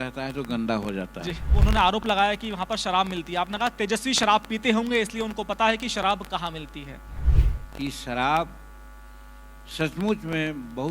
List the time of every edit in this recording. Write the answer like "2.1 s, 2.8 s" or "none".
1.4 s, 7.3 s